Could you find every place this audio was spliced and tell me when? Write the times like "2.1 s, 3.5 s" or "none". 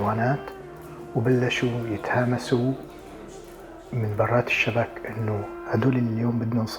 5.6 s